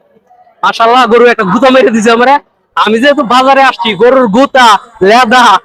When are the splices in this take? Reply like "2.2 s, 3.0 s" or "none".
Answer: none